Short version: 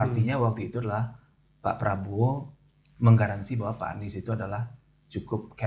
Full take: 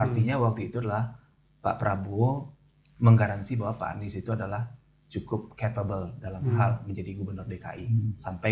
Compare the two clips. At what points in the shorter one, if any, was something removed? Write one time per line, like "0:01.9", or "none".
none